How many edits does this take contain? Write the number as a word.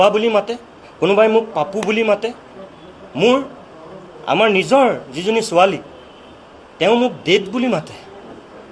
zero